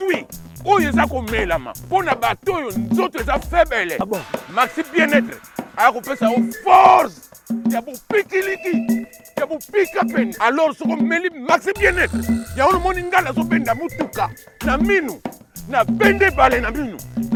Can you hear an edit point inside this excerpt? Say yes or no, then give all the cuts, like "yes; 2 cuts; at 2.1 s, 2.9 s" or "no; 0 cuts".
no; 0 cuts